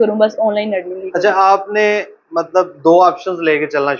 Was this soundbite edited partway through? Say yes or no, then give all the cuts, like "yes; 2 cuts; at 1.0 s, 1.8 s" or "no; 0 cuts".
no; 0 cuts